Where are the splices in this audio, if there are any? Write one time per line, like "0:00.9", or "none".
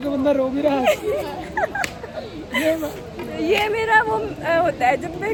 none